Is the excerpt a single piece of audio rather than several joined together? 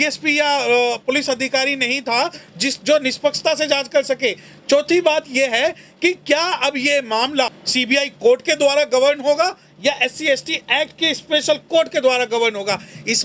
no; 1 cut; at 7.6 s

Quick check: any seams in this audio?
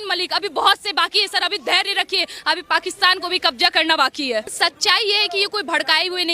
yes; 1 cut; at 4.5 s

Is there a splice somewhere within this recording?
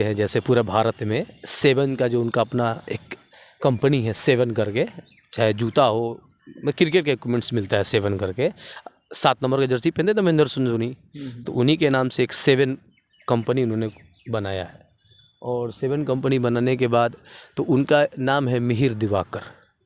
no; 0 cuts

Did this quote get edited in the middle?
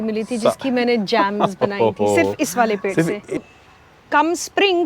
yes; 1 cut; at 3.4 s

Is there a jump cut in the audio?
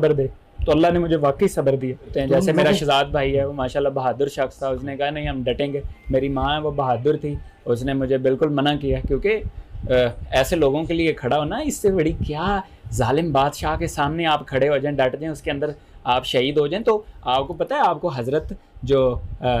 yes; 1 cut; at 2.1 s

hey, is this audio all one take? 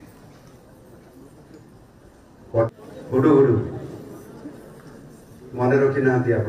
no; 1 cut; at 2.8 s

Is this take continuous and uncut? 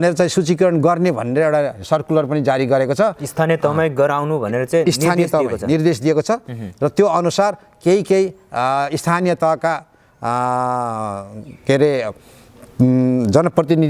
yes; 0 cuts

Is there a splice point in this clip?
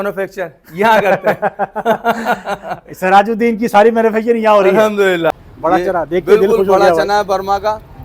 yes; 1 cut; at 5.3 s

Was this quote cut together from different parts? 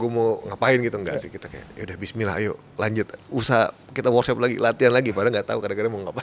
no; 0 cuts

